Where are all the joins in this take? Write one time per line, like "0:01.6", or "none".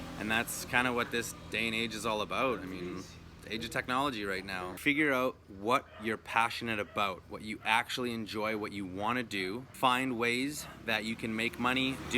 0:04.7
0:09.7